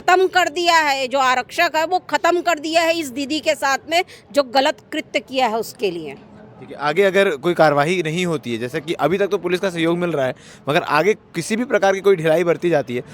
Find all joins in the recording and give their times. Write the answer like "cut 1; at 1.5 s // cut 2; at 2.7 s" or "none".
none

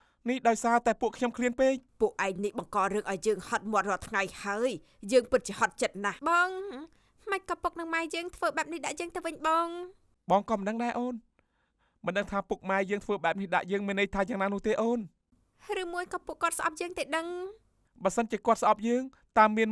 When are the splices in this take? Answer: cut 1; at 1.9 s // cut 2; at 6.0 s

